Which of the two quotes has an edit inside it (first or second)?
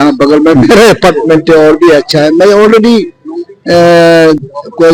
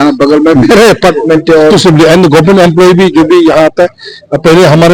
second